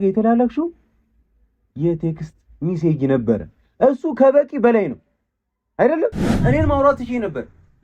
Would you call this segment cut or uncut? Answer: cut